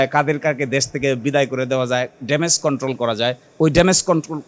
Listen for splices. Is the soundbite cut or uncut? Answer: uncut